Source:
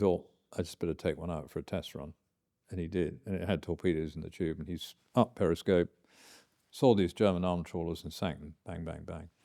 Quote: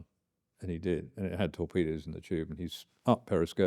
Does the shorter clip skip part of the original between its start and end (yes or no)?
no